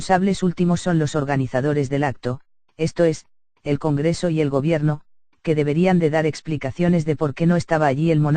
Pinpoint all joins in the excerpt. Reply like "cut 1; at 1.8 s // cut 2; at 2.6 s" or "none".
cut 1; at 4.9 s